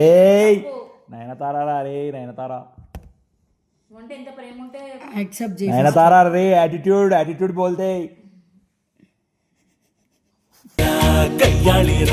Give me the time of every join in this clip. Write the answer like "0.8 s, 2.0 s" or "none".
none